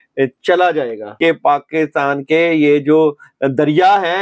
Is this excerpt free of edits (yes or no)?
no